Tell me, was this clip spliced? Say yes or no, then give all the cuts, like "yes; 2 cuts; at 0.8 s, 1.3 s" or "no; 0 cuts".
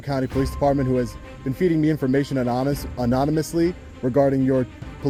no; 0 cuts